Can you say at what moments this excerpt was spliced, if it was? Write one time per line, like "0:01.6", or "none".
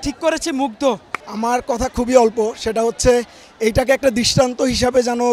0:01.2